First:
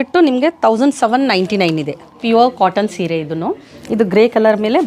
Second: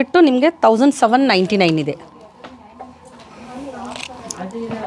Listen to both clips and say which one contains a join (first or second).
first